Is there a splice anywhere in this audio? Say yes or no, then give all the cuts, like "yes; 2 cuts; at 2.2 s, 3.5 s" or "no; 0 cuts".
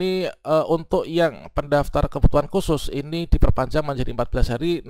no; 0 cuts